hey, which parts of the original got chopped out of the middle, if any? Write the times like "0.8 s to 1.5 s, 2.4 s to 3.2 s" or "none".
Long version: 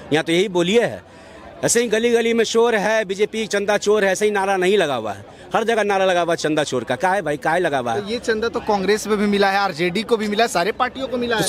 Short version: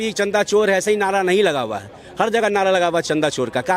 none